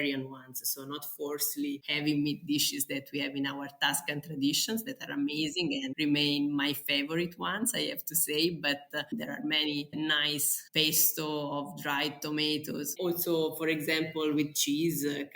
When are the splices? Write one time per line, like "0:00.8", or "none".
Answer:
0:01.9
0:05.9
0:12.9